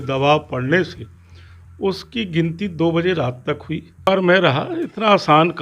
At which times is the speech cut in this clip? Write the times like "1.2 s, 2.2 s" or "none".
4.1 s